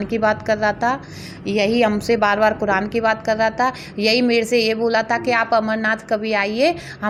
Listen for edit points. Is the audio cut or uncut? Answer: uncut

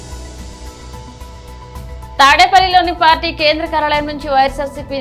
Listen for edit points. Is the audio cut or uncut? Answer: cut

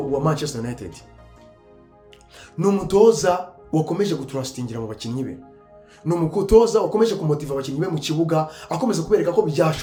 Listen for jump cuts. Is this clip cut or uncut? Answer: uncut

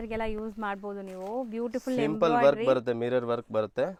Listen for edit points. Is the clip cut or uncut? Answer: uncut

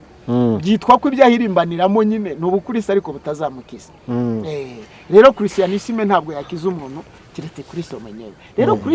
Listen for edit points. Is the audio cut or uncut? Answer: uncut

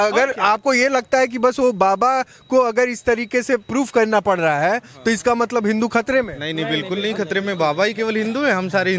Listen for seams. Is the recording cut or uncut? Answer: uncut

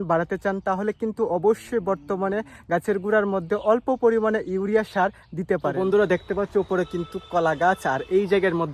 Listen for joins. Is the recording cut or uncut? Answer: uncut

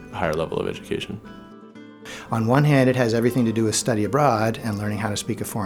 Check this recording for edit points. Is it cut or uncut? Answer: cut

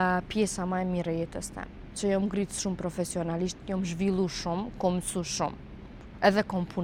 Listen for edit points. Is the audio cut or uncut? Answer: uncut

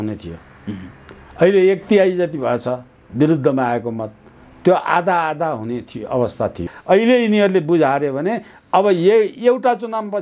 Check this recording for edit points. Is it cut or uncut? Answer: cut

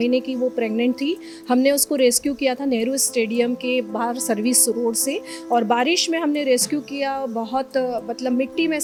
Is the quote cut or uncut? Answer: uncut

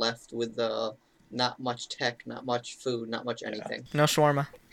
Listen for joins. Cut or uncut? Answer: cut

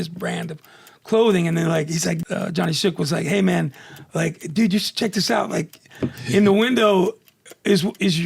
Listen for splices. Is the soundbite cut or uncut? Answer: cut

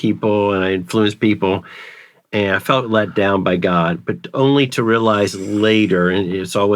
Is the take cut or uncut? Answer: uncut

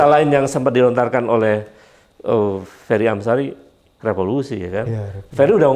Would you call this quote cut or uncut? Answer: uncut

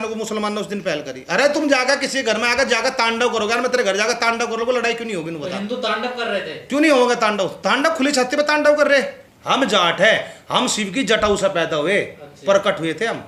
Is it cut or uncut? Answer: cut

